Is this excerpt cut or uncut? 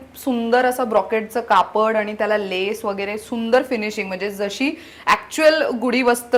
uncut